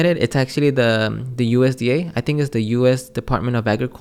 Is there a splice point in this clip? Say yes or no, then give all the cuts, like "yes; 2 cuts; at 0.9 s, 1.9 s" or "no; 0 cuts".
no; 0 cuts